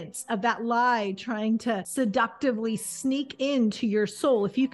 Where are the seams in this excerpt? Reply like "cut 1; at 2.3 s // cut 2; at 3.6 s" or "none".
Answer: cut 1; at 1.9 s